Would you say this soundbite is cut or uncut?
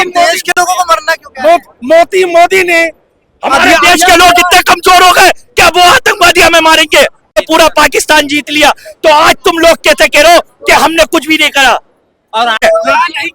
cut